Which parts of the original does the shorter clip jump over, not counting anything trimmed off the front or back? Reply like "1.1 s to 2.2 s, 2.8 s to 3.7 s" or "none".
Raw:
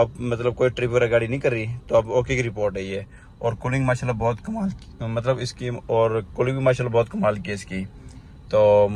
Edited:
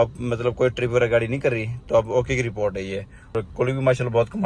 3.3 s to 6.1 s